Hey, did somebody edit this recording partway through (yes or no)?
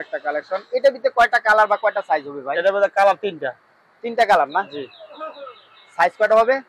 no